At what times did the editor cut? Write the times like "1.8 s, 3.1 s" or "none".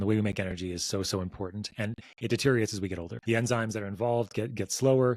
3.1 s